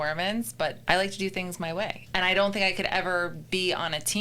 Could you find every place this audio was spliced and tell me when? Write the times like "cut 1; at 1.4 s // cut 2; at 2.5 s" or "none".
cut 1; at 0.8 s // cut 2; at 2.0 s